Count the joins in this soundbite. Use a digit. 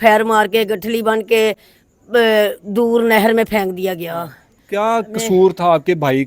0